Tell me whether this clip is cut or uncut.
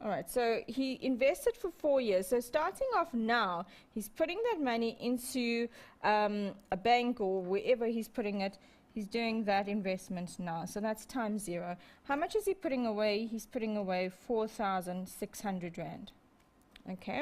cut